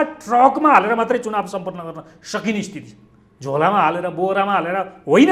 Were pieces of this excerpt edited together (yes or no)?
no